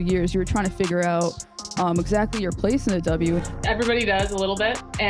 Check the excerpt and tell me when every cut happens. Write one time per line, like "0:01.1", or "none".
0:03.4